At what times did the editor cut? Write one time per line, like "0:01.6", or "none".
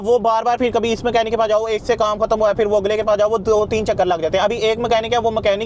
none

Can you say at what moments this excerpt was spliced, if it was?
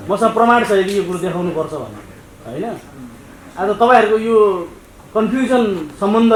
none

